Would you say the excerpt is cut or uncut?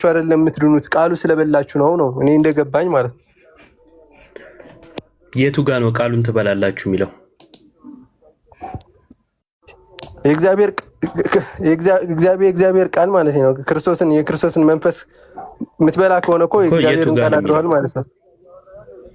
uncut